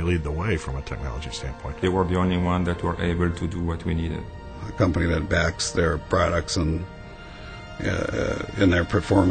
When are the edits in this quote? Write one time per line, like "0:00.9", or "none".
0:01.8
0:04.4

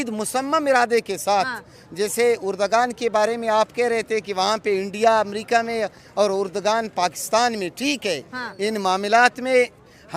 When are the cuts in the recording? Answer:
none

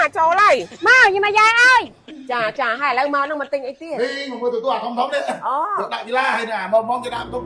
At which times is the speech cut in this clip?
0:02.1

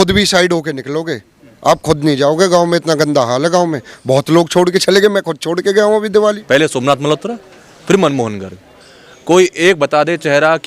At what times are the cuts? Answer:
0:06.4

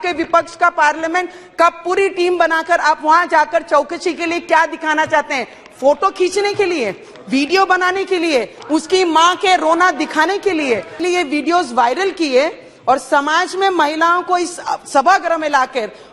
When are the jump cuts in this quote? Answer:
0:11.0

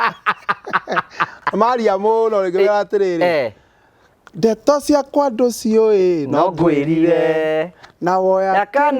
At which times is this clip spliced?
0:01.4

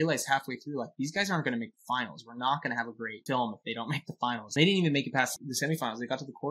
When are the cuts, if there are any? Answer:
0:03.1
0:04.5
0:05.4

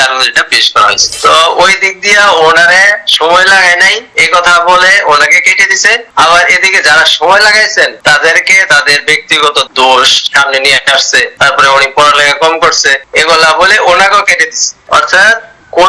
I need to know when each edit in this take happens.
0:01.1

